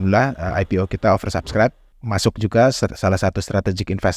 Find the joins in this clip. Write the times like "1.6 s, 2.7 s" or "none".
1.8 s